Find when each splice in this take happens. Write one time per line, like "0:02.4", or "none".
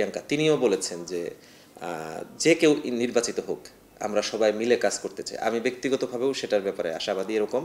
none

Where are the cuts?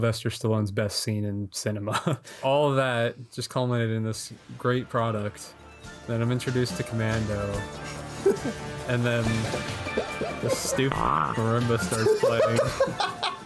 0:02.4

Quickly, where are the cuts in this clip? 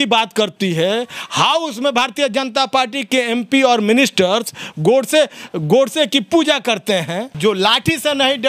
0:07.3

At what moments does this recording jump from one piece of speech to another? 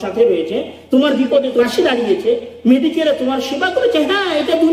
0:01.6

